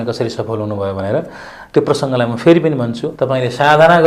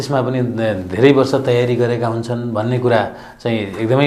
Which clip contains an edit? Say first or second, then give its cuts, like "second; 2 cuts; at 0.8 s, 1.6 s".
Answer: first; 1 cut; at 3.1 s